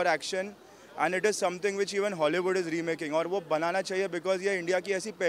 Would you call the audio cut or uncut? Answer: uncut